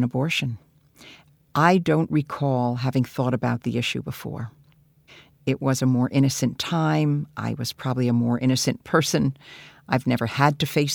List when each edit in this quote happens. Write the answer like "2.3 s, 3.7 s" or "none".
none